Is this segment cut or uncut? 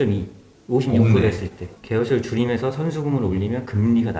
uncut